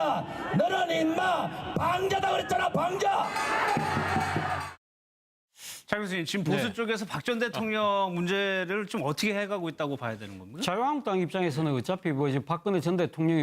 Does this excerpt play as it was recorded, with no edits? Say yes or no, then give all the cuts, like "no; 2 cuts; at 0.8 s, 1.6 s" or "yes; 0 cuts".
no; 1 cut; at 10.3 s